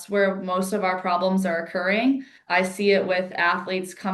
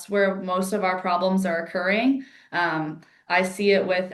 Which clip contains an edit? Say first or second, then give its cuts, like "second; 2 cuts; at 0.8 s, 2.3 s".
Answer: first; 1 cut; at 2.3 s